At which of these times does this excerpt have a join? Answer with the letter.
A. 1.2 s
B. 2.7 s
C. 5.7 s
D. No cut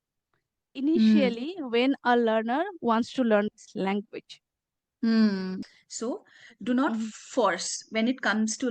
C